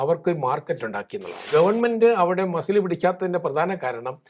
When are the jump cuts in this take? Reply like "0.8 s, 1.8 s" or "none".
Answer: 1.5 s